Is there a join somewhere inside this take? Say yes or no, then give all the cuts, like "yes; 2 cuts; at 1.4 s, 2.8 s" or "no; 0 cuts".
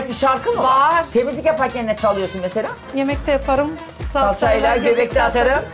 yes; 1 cut; at 2.8 s